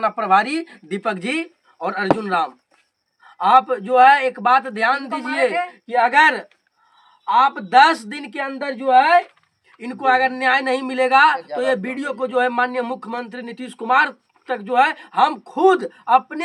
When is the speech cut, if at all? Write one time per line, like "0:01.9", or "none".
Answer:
none